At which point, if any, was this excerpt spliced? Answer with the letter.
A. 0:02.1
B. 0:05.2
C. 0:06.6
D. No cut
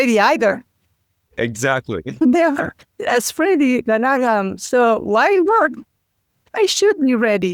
A